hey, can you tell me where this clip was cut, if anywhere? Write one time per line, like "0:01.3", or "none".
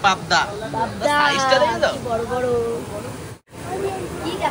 0:03.6